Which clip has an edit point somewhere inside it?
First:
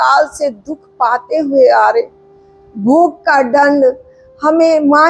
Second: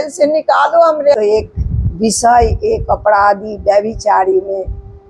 second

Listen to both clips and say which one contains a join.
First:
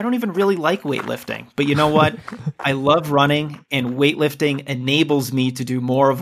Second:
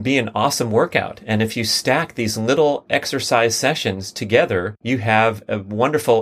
second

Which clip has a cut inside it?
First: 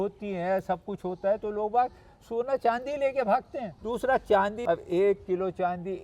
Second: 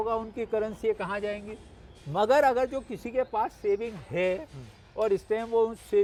first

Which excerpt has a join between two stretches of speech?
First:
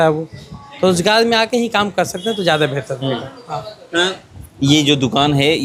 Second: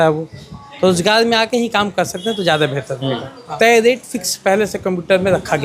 second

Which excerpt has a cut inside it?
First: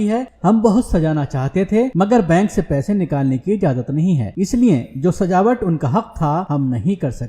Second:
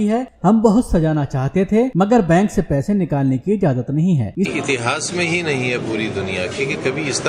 first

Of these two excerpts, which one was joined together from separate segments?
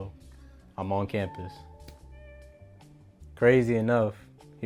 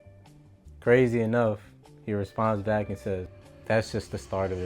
second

